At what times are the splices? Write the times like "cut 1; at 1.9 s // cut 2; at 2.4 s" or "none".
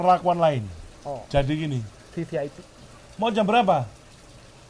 none